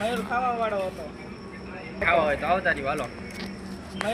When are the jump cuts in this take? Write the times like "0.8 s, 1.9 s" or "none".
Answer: 2.0 s